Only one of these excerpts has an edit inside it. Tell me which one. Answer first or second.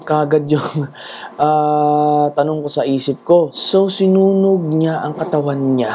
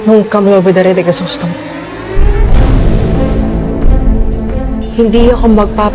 first